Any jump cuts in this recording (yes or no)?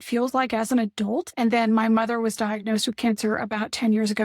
yes